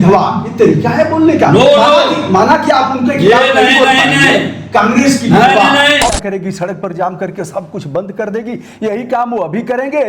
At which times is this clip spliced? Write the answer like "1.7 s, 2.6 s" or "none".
6.1 s